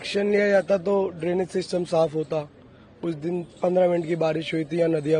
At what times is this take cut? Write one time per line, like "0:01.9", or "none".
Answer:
none